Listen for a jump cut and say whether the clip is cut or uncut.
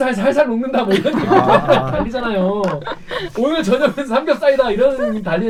uncut